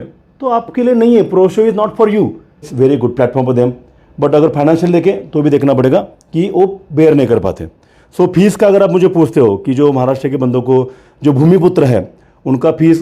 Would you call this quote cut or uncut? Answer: cut